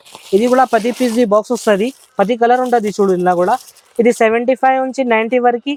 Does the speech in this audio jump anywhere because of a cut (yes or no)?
no